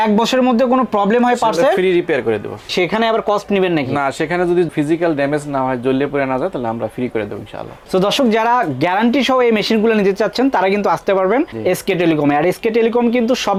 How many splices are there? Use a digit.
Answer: 0